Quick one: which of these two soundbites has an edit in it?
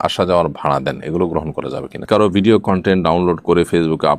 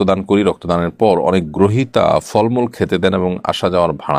first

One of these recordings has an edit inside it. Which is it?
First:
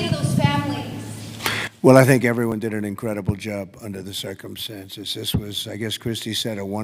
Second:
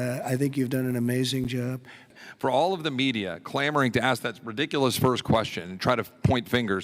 second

